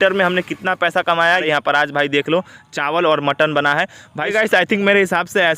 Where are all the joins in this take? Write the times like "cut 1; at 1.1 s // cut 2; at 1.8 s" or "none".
cut 1; at 1.4 s // cut 2; at 4.3 s